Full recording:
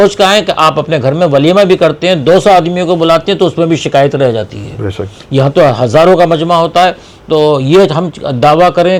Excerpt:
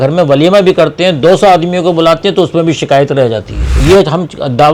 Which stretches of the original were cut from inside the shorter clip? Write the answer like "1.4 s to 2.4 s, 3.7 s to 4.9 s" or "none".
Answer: 4.8 s to 7.6 s

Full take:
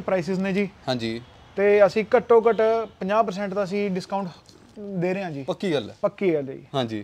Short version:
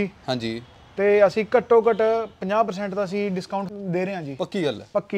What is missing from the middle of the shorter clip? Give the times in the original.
4.3 s to 4.8 s

